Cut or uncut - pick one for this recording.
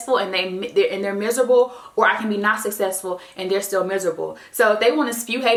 uncut